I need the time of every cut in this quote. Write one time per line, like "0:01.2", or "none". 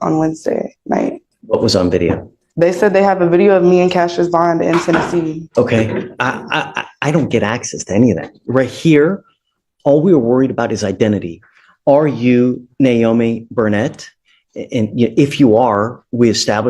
0:01.3
0:05.4